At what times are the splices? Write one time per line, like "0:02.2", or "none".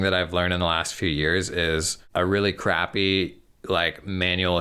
0:02.0

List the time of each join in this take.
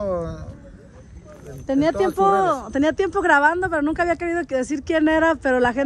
none

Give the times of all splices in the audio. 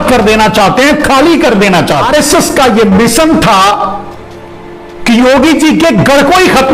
0:02.1

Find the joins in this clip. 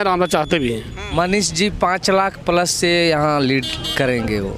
0:01.0

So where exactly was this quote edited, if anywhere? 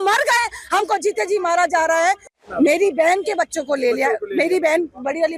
0:02.3

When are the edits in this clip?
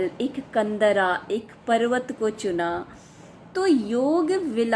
0:03.0

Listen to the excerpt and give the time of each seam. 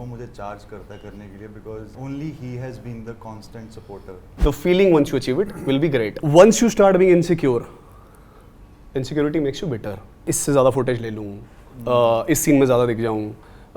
0:01.9
0:04.3
0:06.2
0:10.1

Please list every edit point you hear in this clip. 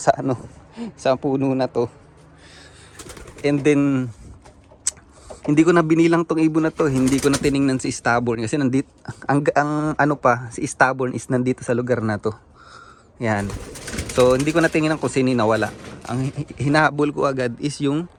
none

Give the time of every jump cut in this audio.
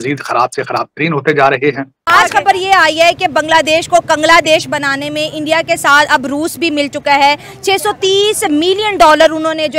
0:01.9

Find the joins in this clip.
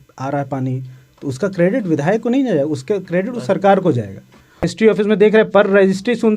0:04.7

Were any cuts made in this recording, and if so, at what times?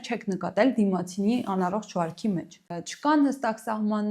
0:02.8

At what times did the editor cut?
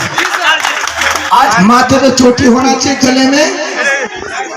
0:01.5

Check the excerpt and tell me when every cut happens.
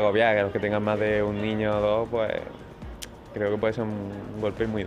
none

